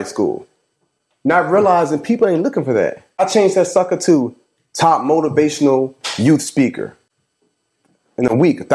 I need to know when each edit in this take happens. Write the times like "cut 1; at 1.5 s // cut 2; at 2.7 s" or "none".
cut 1; at 3.0 s